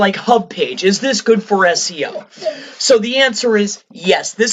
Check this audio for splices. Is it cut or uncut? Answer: uncut